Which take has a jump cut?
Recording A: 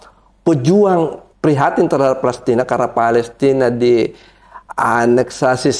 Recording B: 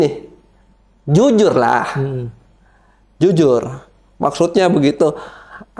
A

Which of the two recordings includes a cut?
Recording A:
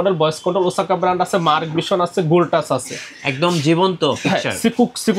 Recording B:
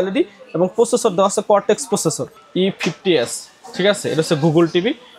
B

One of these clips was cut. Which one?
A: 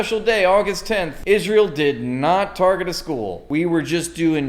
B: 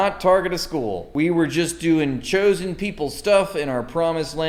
A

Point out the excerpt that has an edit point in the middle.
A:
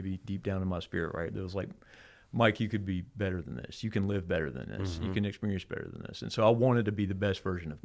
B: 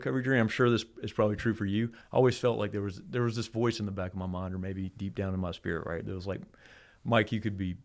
B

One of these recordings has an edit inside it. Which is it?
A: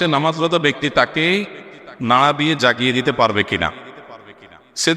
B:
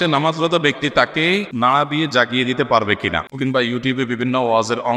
B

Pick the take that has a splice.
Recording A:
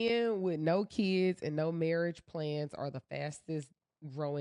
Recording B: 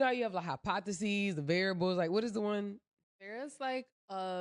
B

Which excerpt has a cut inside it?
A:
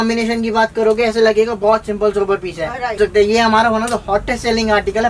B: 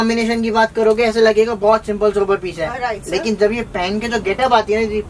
A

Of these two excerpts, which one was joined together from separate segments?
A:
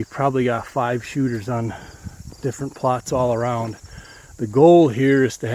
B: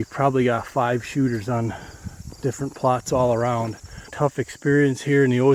B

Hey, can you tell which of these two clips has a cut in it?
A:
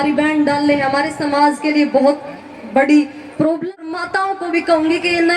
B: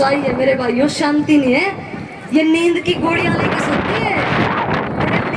A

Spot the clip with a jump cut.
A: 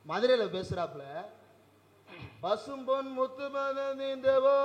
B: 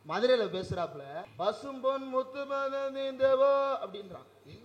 B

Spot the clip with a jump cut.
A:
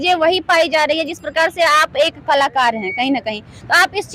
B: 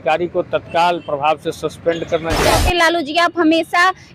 B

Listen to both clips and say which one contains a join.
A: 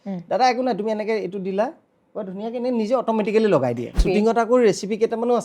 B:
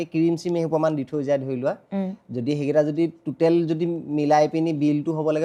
A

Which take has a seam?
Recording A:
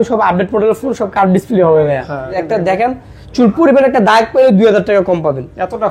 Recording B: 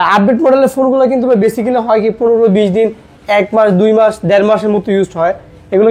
A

